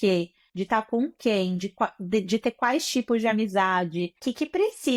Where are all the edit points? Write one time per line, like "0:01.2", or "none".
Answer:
none